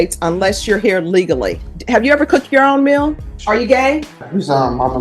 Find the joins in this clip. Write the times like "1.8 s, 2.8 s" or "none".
1.7 s, 3.3 s, 4.2 s